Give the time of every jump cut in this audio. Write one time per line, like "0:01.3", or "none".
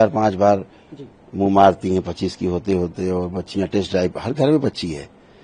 none